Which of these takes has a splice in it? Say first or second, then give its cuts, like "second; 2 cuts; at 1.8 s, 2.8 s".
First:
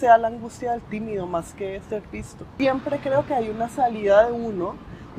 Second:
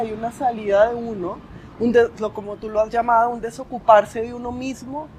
first; 1 cut; at 2.5 s